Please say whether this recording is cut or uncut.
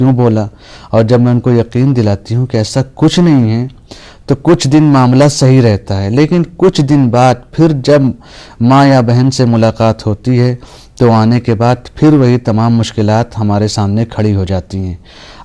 cut